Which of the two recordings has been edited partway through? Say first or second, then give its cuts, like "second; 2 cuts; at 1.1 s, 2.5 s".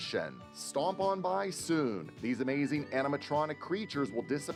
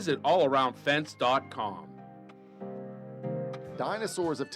second; 1 cut; at 3.6 s